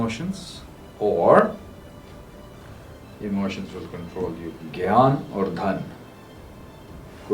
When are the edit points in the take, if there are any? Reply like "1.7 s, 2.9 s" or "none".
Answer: 4.5 s